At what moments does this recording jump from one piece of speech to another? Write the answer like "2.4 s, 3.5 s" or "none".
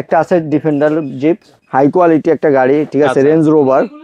1.5 s

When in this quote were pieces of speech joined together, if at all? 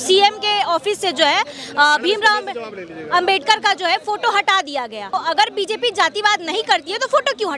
5.1 s

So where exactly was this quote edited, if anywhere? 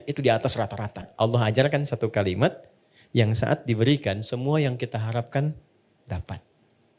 1.1 s

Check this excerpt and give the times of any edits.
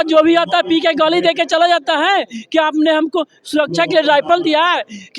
none

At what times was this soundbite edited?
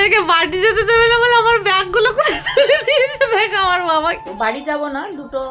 4.2 s

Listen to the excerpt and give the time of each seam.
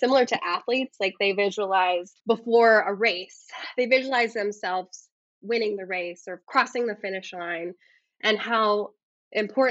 2.1 s

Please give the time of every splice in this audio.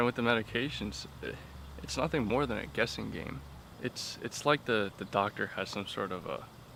none

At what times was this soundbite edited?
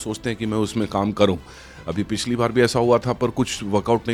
none

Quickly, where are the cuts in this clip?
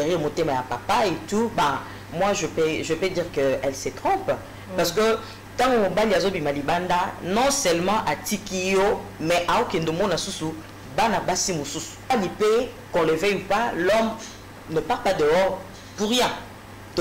12.1 s

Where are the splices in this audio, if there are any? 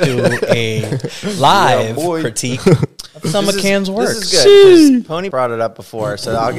5.3 s

